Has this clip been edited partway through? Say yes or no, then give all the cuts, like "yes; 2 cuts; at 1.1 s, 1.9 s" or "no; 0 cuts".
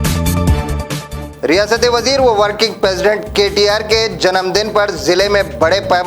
yes; 1 cut; at 1.0 s